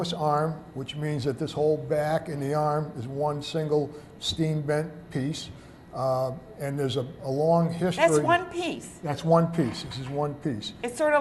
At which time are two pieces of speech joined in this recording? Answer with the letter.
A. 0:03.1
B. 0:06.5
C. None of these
B